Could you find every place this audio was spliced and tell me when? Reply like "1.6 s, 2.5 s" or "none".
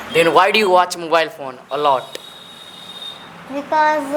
none